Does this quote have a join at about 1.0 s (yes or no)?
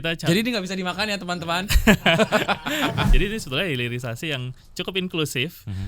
no